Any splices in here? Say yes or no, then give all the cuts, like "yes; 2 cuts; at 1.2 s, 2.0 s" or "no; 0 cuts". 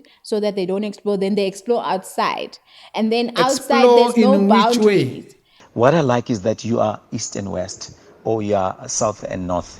yes; 1 cut; at 5.6 s